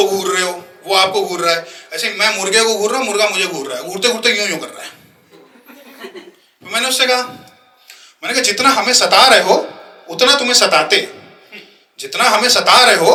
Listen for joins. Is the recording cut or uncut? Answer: uncut